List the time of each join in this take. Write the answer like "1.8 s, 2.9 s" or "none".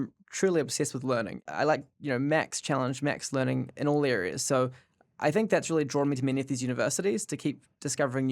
1.4 s